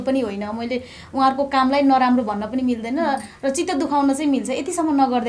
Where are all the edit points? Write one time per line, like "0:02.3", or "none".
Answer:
none